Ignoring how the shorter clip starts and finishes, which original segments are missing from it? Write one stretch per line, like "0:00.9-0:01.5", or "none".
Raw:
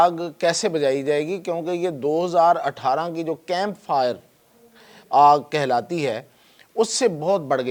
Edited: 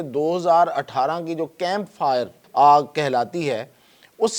0:04.3-0:05.0